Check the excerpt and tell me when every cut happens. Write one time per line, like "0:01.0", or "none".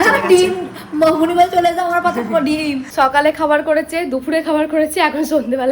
0:02.9